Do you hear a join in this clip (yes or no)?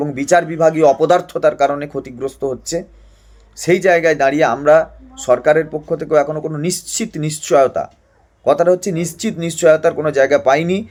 no